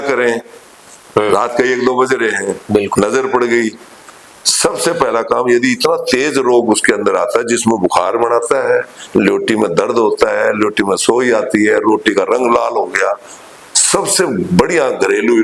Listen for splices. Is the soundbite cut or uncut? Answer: uncut